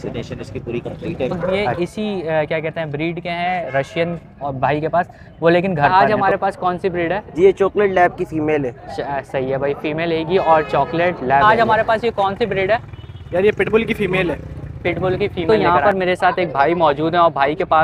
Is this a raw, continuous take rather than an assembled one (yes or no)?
no